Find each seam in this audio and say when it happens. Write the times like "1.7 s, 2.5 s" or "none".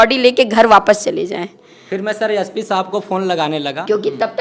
none